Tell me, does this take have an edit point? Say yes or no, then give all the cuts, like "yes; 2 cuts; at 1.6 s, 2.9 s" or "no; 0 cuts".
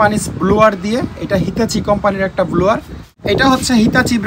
yes; 1 cut; at 3.1 s